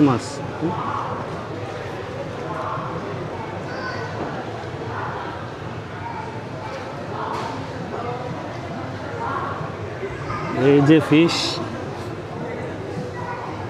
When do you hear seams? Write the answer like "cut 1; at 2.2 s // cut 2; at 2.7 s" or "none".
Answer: none